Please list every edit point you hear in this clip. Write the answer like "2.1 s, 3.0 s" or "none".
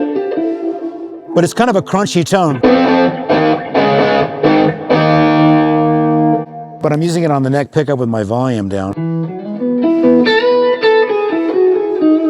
1.2 s, 6.5 s